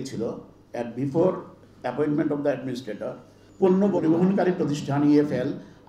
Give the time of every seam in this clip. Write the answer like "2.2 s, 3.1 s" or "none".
3.9 s